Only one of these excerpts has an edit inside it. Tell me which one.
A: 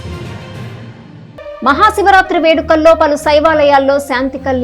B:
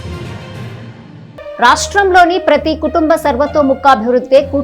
B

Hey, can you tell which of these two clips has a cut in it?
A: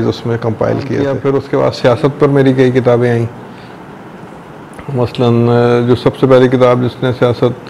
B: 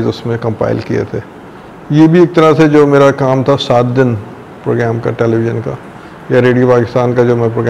A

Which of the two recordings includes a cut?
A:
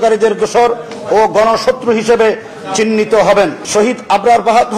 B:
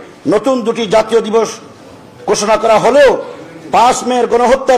A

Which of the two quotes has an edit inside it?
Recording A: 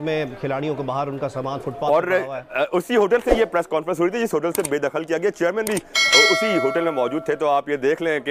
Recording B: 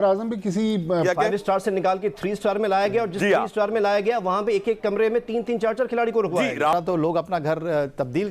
B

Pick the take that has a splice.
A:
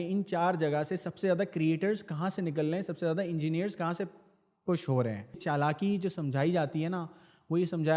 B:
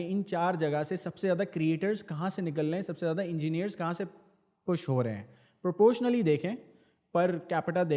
A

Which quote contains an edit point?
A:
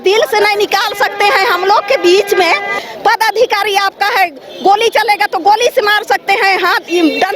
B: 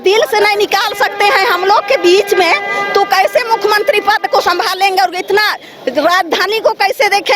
A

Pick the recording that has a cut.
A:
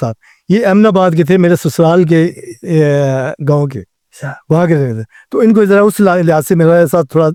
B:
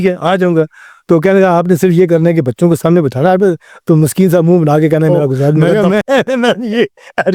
B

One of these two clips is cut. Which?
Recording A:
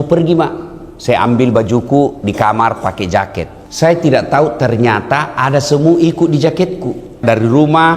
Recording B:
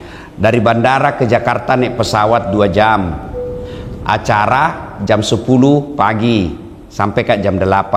A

